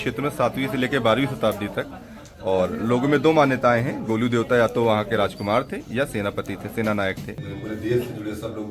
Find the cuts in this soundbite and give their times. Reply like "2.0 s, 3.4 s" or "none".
7.4 s